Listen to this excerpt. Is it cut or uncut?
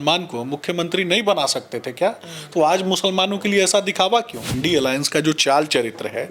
cut